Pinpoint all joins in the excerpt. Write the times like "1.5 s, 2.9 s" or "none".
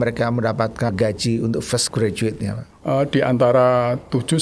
0.9 s